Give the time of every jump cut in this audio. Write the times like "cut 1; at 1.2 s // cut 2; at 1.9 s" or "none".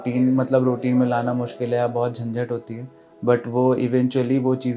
none